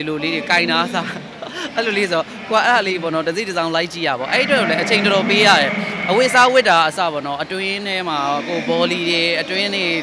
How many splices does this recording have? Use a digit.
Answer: 0